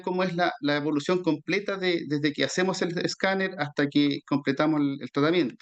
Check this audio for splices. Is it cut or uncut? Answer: uncut